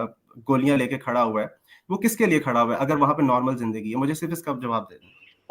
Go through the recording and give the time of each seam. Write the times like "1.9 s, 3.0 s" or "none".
none